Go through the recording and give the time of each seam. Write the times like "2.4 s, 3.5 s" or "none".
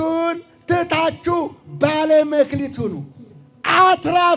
none